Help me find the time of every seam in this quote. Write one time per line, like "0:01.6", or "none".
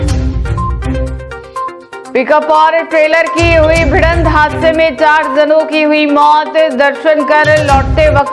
0:00.9